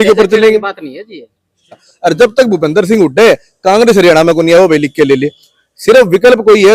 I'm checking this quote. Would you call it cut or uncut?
cut